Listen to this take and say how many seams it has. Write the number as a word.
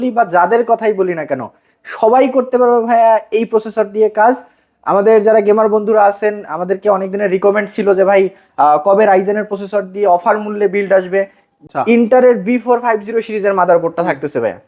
one